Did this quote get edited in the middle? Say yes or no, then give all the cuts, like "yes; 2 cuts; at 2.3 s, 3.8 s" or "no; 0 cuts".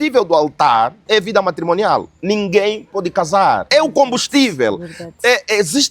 yes; 3 cuts; at 1.1 s, 2.1 s, 3.6 s